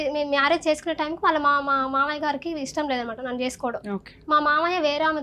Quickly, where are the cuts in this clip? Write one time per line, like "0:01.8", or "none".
none